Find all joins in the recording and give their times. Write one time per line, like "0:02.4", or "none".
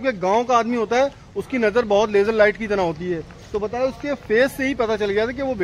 none